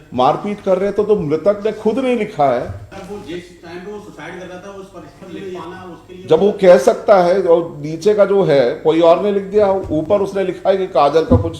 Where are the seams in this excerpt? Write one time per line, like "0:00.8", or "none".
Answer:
0:02.8
0:05.6